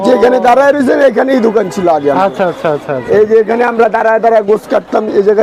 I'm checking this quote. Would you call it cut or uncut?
uncut